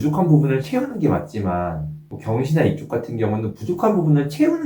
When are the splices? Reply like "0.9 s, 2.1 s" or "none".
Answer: none